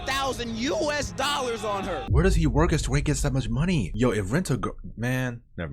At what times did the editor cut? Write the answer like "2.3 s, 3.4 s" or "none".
2.0 s